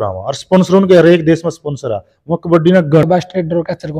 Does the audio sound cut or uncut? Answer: cut